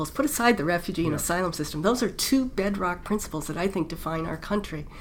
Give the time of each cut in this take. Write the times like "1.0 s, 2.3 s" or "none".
none

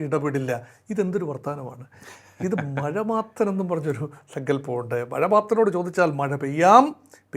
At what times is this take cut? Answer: none

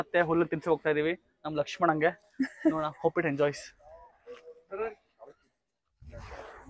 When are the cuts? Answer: none

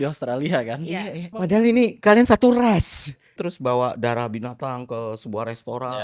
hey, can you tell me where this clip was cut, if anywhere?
1.3 s, 3.3 s

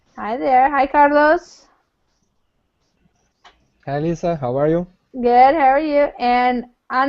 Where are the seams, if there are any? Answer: 4.5 s

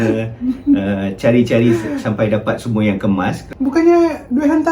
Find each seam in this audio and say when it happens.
3.4 s

